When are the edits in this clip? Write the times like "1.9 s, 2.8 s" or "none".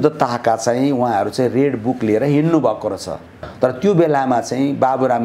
3.4 s